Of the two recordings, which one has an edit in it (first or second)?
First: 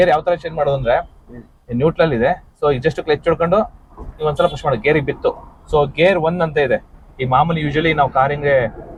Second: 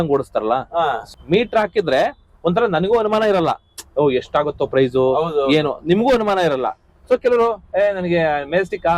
second